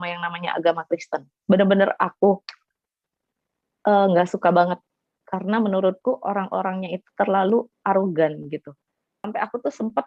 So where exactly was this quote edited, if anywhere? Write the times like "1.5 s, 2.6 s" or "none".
9.2 s